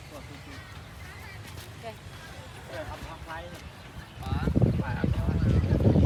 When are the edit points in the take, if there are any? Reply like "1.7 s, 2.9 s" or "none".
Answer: none